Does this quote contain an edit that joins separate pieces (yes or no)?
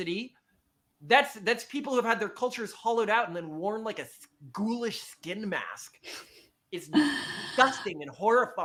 no